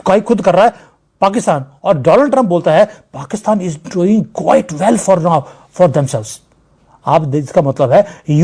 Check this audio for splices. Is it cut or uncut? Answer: uncut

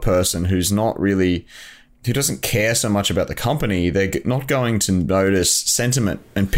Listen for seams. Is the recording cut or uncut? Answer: uncut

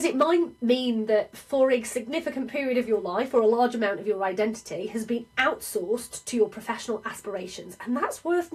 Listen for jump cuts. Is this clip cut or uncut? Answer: uncut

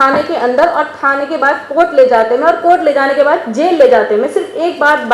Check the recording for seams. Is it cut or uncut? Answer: uncut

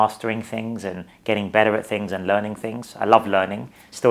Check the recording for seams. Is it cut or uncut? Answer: uncut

